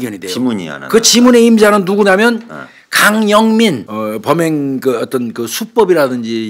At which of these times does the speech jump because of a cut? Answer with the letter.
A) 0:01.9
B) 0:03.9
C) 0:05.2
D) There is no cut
B